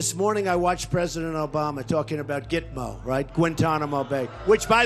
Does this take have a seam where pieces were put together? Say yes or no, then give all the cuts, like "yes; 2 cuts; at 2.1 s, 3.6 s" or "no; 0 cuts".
no; 0 cuts